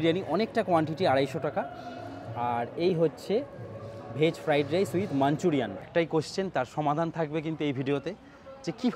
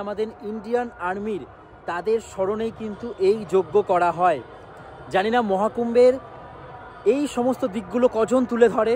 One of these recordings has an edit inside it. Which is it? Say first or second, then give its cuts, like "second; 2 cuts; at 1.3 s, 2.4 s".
first; 1 cut; at 5.9 s